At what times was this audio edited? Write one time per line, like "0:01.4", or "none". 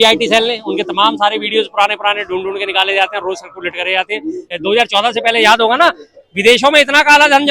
0:04.5